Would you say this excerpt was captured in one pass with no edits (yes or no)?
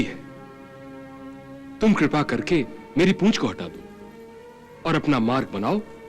yes